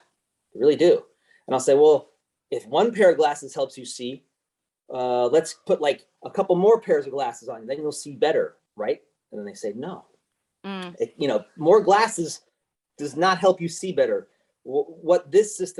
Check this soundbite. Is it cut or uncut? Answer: uncut